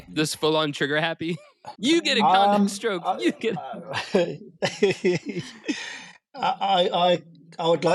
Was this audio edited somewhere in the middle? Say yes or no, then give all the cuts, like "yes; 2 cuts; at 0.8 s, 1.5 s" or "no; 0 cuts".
yes; 1 cut; at 1.8 s